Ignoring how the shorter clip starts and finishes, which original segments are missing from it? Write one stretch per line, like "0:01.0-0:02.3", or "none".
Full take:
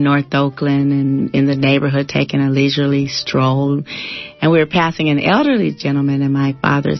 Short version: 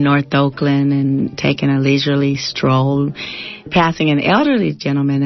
0:01.3-0:02.0
0:04.4-0:04.7